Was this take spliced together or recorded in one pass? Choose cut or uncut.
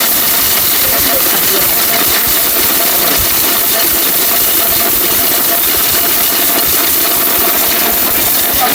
uncut